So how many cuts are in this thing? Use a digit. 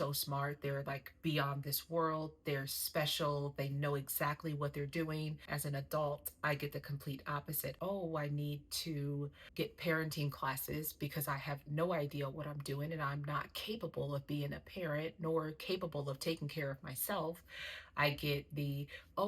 2